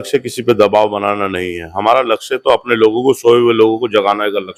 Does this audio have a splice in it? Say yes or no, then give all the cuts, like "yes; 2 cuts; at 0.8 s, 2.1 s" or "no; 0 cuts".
no; 0 cuts